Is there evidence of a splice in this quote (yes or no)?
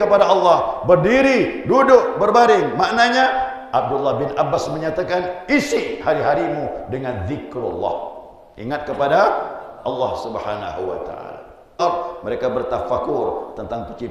yes